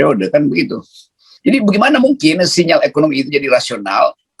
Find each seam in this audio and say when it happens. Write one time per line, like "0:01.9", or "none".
0:01.3